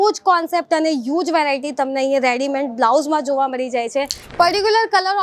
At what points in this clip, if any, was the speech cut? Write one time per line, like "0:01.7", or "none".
0:04.2